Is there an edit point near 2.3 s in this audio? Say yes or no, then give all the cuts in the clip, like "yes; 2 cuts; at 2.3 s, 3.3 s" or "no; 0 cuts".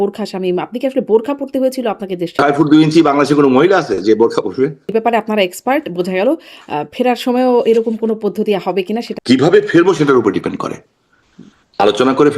yes; 3 cuts; at 2.3 s, 4.9 s, 9.1 s